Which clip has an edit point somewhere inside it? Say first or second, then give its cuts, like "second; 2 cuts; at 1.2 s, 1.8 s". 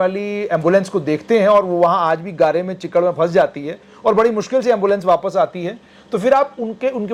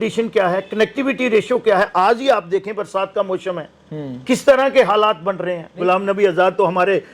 second; 1 cut; at 5.8 s